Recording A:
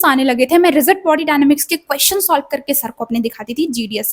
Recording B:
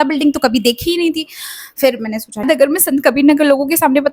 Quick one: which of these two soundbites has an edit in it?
B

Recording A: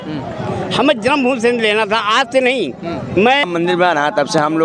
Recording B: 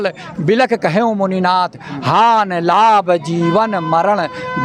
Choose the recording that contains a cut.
A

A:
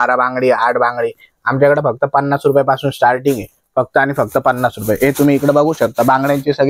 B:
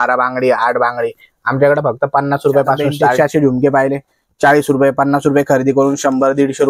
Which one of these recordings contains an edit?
B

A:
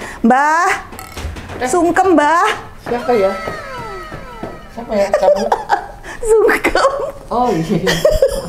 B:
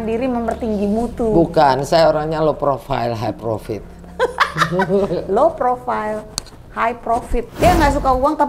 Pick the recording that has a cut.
B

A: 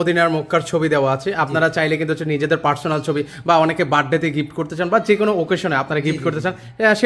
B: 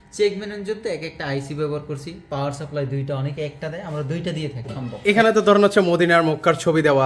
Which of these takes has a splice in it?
B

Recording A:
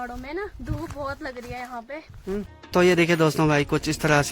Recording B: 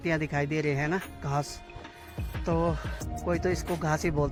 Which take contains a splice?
A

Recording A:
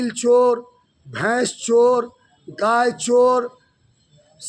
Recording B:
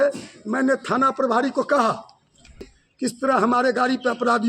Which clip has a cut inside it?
B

